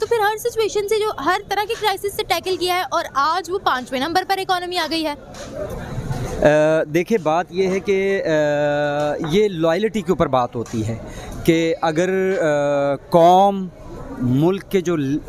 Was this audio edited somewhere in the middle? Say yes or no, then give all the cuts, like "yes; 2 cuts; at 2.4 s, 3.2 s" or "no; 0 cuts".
no; 0 cuts